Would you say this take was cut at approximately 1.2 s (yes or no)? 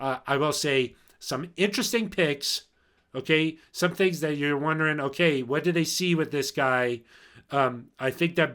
no